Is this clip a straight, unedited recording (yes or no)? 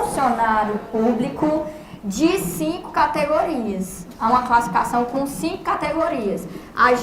yes